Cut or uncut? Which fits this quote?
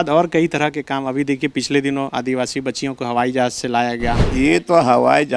cut